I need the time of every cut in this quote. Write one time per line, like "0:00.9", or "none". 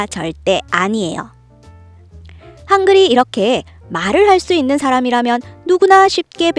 0:02.0